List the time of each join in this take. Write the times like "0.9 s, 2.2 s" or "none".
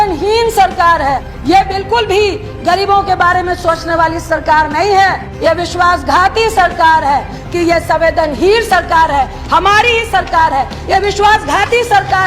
1.3 s, 5.3 s, 7.4 s